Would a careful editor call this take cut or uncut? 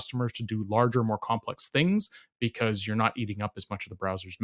uncut